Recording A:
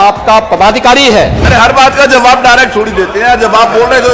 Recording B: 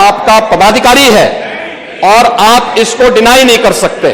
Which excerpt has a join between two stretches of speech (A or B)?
A